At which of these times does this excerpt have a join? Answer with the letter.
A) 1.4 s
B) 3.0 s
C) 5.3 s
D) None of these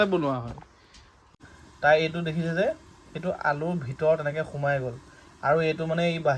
A